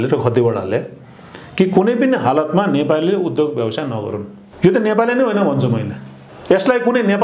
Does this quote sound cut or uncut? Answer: uncut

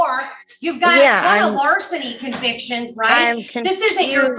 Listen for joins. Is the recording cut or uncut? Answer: uncut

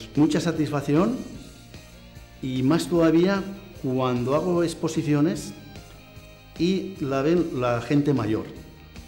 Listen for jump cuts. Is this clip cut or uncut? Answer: uncut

